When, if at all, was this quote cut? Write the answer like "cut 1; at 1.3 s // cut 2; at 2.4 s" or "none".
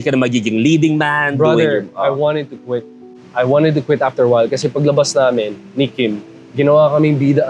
none